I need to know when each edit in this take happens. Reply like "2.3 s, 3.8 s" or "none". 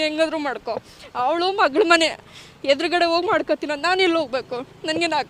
none